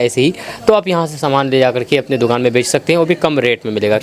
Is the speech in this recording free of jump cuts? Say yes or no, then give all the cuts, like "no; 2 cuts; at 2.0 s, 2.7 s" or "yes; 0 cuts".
yes; 0 cuts